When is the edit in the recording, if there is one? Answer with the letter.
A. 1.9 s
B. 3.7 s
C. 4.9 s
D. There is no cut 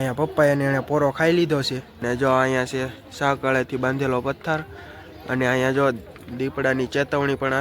A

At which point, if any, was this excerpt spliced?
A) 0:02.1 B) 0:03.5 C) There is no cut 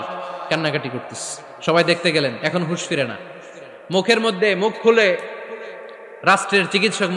C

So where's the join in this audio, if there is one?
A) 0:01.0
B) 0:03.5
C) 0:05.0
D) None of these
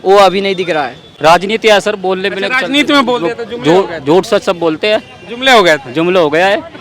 A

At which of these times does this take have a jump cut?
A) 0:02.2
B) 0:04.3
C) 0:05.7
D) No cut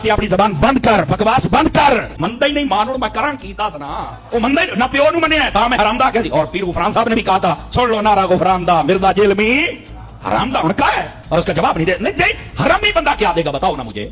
A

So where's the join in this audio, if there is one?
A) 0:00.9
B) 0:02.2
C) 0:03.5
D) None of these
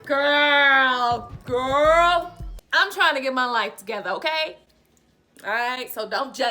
D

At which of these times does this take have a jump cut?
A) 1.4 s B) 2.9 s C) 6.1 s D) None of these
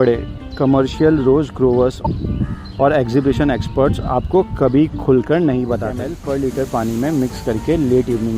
C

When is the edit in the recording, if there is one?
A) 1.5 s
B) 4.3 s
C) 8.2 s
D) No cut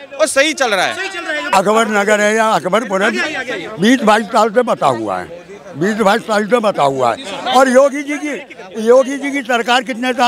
A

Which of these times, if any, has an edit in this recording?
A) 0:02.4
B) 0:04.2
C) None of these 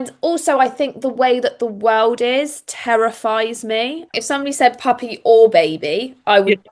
B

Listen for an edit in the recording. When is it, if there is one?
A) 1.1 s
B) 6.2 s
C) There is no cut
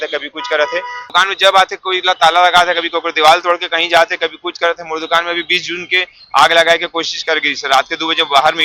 A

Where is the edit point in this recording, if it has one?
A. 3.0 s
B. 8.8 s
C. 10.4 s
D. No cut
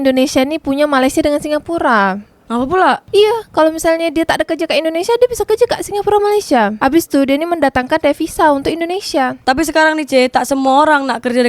A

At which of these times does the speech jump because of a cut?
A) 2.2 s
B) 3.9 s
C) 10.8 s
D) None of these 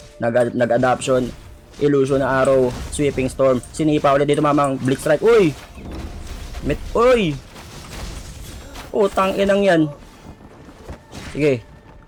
D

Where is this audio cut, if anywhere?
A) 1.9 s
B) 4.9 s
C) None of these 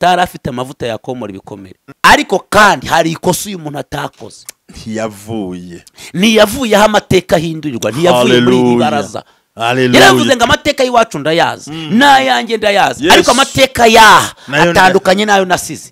A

